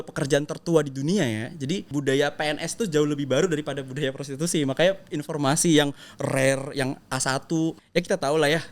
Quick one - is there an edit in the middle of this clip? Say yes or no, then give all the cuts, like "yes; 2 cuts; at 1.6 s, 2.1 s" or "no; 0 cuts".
yes; 2 cuts; at 1.9 s, 7.8 s